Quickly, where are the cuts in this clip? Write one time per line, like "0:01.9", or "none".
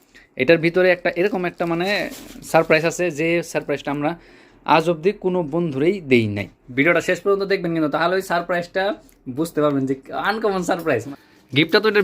0:06.6
0:11.1